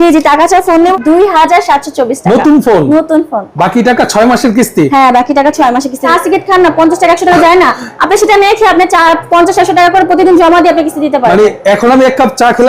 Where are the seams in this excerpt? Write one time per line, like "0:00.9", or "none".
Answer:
0:01.0
0:06.0